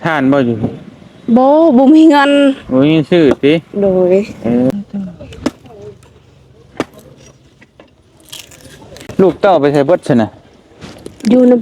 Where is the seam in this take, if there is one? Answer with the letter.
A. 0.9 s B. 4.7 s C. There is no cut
B